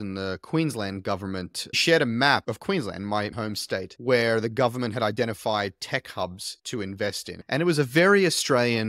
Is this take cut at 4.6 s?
no; 2 cuts; at 1.8 s, 7.3 s

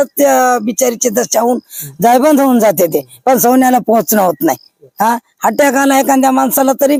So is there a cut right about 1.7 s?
no; 0 cuts

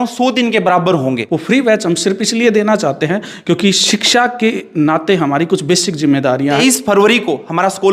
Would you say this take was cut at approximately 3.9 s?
no; 2 cuts; at 1.3 s, 6.4 s

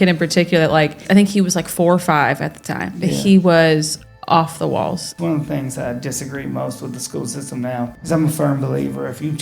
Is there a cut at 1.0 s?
yes; 3 cuts; at 1.0 s, 5.1 s, 8.0 s

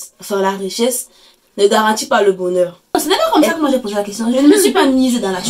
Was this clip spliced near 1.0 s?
no; 1 cut; at 3.2 s

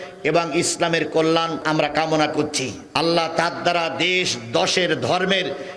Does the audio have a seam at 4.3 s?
no; 2 cuts; at 1.6 s, 2.8 s

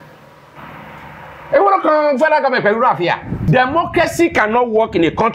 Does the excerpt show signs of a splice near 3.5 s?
yes; 1 cut; at 3.5 s

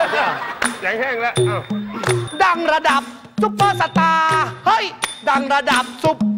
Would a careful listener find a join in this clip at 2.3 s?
yes; 1 cut; at 2.3 s

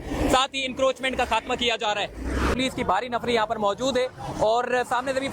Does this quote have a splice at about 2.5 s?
yes; 1 cut; at 2.5 s

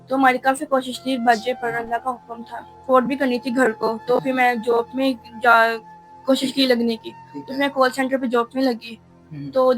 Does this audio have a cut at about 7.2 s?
no; 1 cut; at 2.8 s

